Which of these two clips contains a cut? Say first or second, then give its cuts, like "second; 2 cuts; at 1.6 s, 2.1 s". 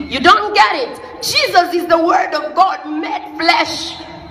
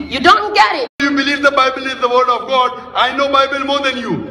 first; 1 cut; at 0.9 s